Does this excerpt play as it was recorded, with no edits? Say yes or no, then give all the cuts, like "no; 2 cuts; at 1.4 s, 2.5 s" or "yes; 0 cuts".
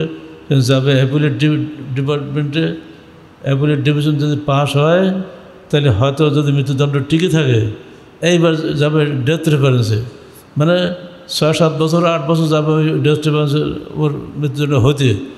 yes; 0 cuts